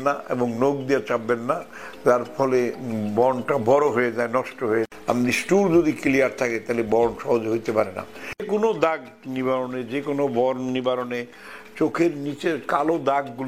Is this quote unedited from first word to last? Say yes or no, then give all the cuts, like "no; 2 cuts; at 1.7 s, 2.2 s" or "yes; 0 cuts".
no; 2 cuts; at 4.9 s, 8.4 s